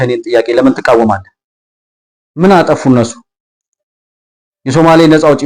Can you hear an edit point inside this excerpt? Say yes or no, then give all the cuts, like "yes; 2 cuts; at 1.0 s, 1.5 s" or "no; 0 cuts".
no; 0 cuts